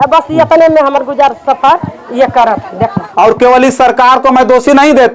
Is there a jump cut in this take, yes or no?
yes